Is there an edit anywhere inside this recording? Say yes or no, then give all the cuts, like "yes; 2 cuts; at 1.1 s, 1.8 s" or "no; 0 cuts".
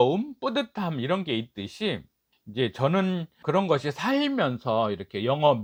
no; 0 cuts